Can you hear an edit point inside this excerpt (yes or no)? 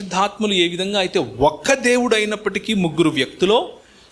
no